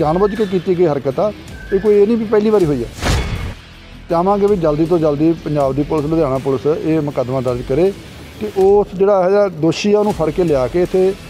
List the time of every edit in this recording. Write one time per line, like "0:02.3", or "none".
0:03.5